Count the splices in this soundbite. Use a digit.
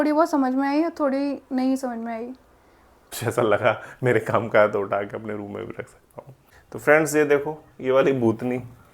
2